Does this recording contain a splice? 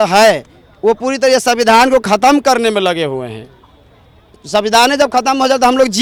no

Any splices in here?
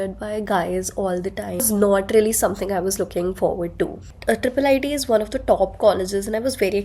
yes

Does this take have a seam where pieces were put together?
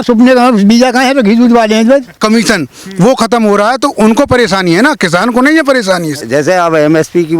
yes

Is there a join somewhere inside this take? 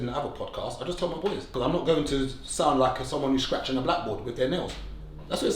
yes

